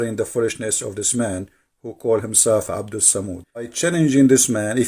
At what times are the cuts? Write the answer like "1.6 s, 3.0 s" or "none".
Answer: 3.7 s